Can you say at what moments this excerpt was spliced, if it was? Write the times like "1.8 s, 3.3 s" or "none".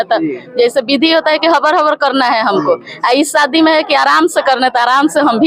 none